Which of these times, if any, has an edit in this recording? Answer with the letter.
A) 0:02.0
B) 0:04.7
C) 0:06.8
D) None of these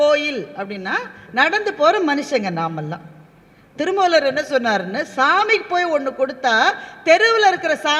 D